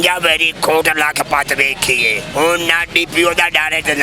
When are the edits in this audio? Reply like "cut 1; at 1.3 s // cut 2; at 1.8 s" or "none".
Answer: cut 1; at 2.2 s